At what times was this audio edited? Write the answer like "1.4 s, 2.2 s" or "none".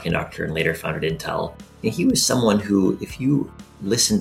none